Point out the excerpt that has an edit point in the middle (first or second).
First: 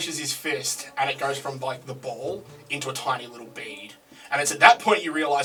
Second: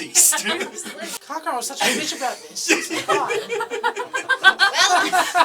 second